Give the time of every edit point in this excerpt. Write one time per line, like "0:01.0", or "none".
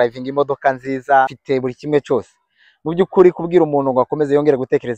0:01.2